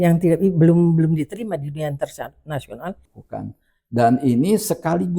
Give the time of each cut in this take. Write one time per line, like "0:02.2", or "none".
0:03.1